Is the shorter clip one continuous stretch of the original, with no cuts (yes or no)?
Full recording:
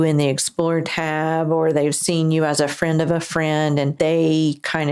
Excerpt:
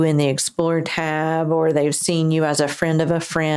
yes